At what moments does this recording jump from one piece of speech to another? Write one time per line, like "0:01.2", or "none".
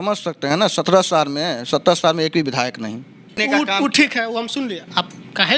0:03.3

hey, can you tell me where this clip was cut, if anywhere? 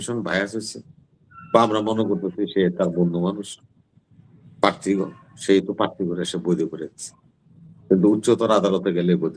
none

